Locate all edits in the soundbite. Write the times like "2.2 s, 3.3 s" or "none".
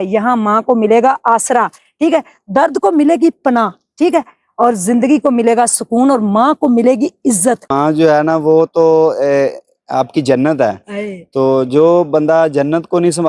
7.7 s